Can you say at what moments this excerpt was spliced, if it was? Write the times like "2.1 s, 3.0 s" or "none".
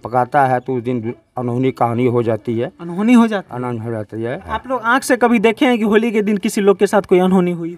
4.4 s